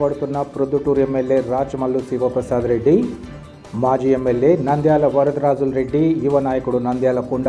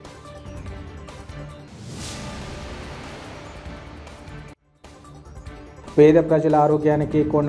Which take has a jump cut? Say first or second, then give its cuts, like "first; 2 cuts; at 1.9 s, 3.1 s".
second; 1 cut; at 1.5 s